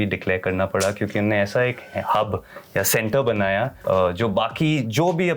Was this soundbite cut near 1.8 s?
no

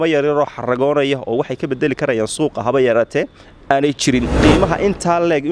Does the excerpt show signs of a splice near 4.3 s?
yes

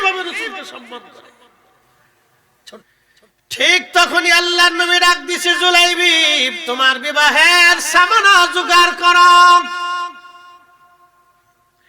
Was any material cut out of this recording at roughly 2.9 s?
yes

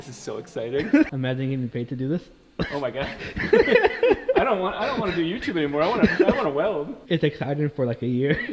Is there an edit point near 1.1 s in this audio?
yes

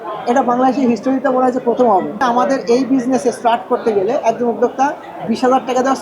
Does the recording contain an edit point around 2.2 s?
yes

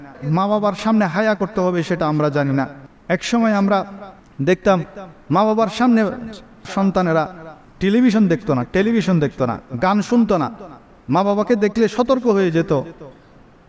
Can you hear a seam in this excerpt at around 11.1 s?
no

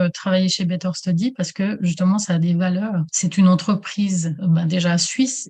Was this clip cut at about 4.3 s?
yes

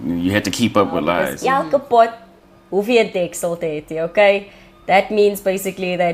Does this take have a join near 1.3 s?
yes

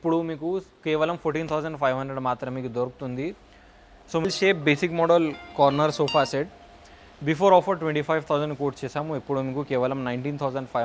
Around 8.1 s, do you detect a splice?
no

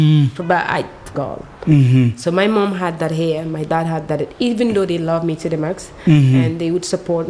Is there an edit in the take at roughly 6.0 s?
no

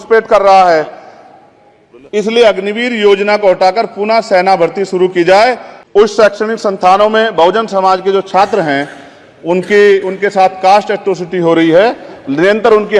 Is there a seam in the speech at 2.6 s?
no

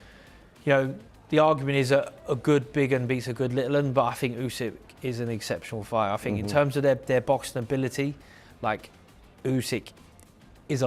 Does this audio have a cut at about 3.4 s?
no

